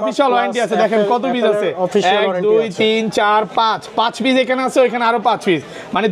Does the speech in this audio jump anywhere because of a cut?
no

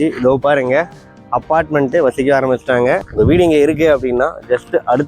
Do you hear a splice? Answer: yes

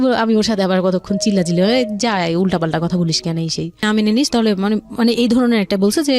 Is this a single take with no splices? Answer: no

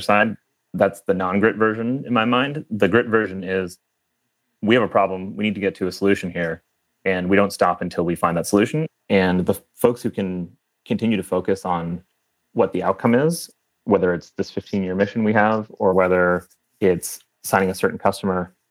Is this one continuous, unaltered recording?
no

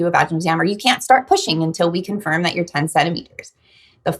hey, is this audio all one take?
yes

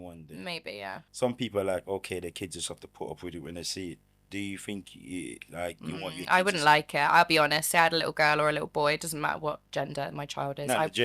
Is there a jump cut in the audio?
yes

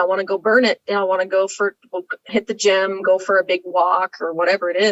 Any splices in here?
no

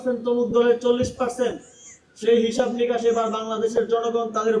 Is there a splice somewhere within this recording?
no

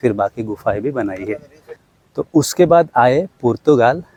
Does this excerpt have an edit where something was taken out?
no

